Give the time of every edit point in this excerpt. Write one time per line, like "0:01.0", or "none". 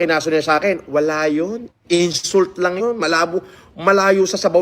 0:03.3